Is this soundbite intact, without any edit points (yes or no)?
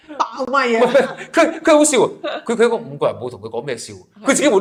yes